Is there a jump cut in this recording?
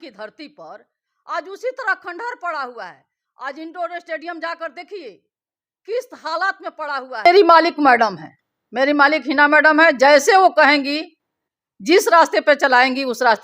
yes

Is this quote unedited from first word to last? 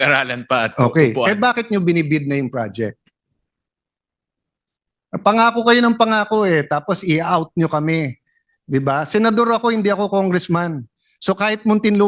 yes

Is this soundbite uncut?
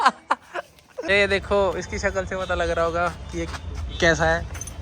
no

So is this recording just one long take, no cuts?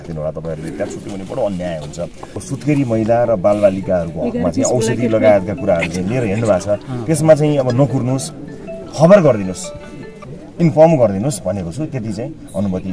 no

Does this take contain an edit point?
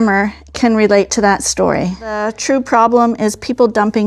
yes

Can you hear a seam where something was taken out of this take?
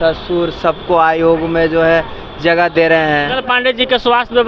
yes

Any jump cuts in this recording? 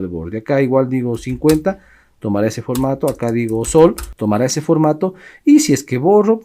yes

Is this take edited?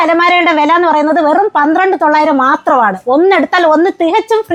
no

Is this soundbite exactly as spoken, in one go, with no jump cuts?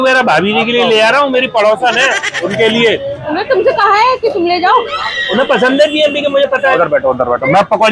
no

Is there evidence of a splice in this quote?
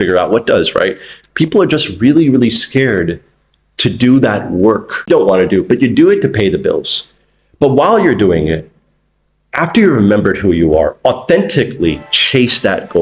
yes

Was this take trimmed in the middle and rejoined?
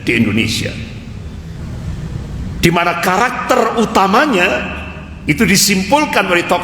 yes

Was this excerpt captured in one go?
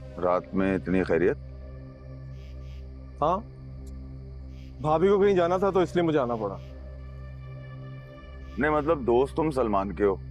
yes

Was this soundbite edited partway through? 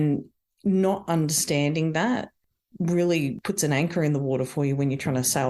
yes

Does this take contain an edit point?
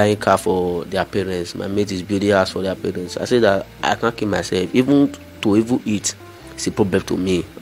no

